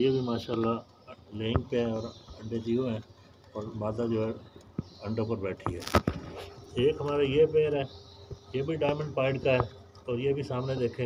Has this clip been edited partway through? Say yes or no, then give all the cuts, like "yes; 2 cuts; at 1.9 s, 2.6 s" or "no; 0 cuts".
no; 0 cuts